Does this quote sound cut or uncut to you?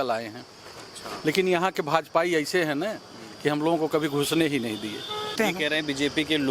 cut